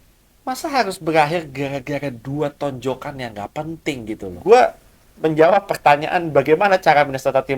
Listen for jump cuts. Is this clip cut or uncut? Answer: cut